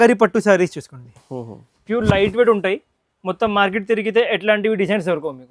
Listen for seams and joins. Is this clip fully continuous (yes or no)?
yes